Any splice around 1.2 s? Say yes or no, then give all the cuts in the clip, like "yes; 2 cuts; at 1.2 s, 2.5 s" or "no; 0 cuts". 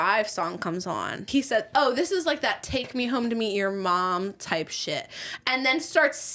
yes; 1 cut; at 1.2 s